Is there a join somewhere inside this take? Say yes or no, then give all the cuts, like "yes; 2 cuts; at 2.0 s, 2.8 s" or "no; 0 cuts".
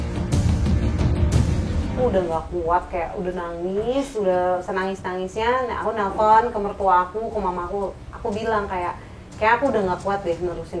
yes; 1 cut; at 2.0 s